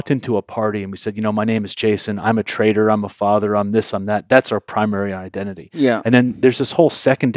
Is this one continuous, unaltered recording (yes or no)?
yes